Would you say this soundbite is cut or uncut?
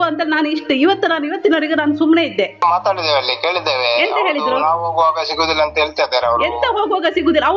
cut